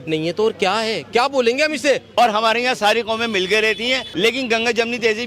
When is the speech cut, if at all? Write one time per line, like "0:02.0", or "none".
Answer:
0:02.1
0:04.1